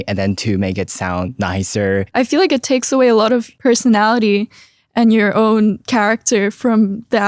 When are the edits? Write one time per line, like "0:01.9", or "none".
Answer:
0:02.1